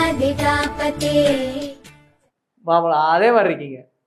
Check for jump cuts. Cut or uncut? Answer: uncut